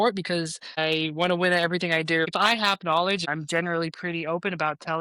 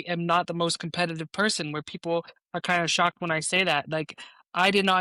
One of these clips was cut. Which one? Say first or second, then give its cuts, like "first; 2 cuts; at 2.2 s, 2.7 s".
first; 3 cuts; at 0.8 s, 2.3 s, 3.3 s